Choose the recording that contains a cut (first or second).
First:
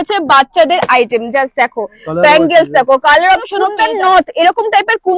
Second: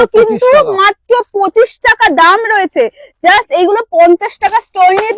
first